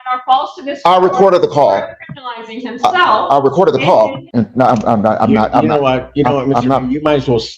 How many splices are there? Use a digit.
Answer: 1